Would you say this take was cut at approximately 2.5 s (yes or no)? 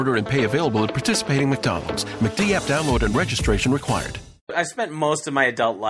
no